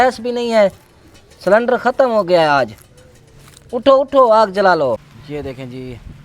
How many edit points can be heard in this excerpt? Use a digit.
1